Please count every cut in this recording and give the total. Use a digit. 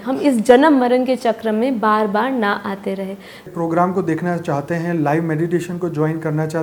1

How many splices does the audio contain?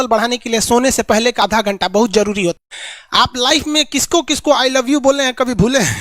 2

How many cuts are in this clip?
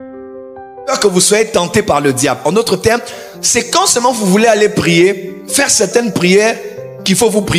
1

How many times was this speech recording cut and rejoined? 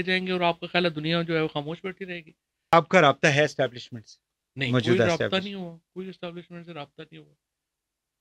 1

